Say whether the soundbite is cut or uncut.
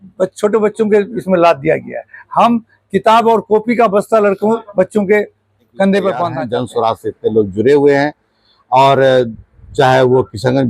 cut